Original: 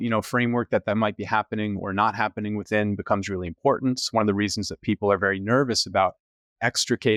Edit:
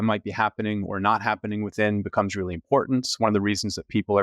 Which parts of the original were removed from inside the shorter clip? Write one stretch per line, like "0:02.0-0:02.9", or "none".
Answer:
none